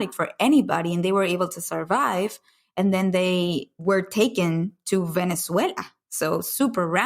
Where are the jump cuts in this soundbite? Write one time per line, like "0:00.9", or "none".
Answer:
0:03.7